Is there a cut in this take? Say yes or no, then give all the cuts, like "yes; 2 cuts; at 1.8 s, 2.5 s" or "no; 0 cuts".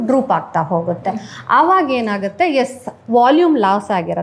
no; 0 cuts